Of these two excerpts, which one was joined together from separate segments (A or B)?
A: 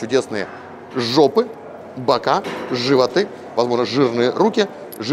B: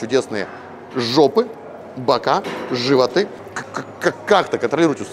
B